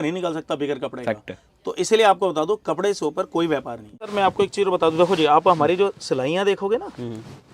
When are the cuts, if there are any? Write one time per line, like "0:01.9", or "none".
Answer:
0:04.1